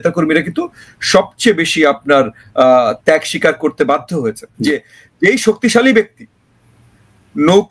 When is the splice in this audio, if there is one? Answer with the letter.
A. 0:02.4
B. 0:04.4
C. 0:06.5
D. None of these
B